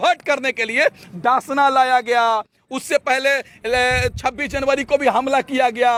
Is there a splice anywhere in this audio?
no; 0 cuts

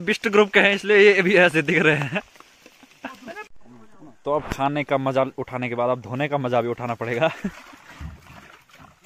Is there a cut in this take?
yes; 1 cut; at 3.5 s

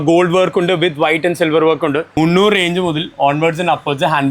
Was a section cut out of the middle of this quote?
yes; 1 cut; at 2.1 s

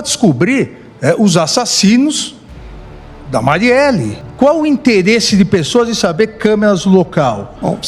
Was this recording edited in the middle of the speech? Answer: yes; 1 cut; at 4.2 s

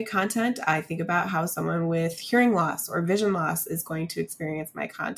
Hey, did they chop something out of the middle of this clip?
no; 0 cuts

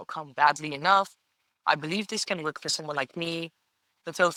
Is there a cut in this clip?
no; 0 cuts

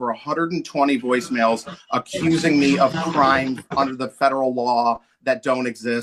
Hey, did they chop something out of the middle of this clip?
no; 0 cuts

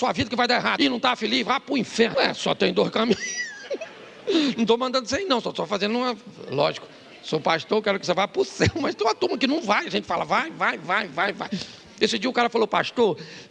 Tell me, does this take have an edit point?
yes; 2 cuts; at 0.7 s, 2.1 s

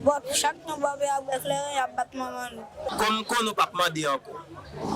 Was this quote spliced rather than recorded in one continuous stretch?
yes; 1 cut; at 2.9 s

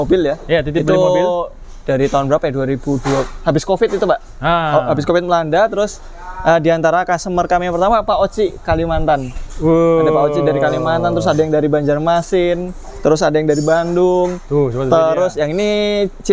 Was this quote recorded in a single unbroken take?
yes; 0 cuts

